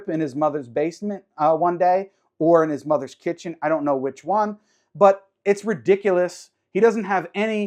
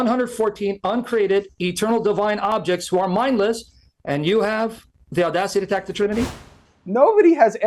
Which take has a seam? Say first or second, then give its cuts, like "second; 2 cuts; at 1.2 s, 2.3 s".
second; 1 cut; at 6.5 s